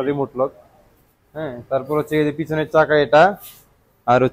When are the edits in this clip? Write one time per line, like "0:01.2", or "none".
none